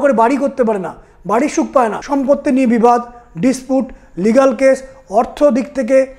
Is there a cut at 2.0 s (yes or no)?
yes